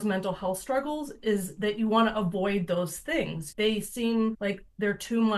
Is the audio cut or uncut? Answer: cut